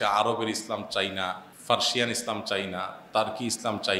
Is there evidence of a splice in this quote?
yes; 1 cut; at 1.5 s

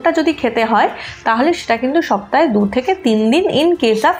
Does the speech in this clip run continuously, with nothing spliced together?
yes; 0 cuts

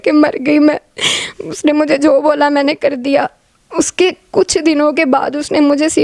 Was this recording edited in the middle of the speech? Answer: no; 0 cuts

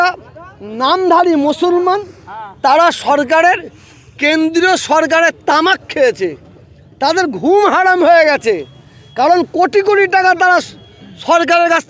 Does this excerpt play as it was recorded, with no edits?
yes; 0 cuts

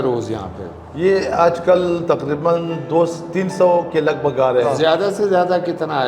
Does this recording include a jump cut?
yes; 1 cut; at 4.7 s

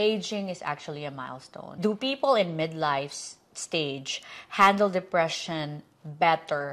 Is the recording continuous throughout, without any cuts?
no; 1 cut; at 1.8 s

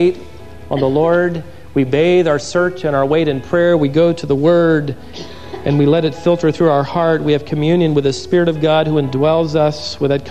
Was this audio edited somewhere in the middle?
no; 0 cuts

